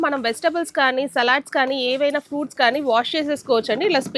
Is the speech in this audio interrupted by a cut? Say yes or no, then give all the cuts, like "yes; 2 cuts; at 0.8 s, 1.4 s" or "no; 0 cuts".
no; 0 cuts